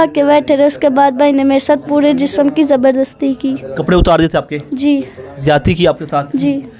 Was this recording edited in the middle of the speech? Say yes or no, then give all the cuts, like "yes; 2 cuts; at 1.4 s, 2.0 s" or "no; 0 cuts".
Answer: no; 0 cuts